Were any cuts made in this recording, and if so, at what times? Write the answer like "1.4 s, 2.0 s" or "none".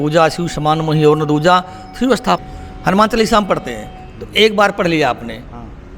2.4 s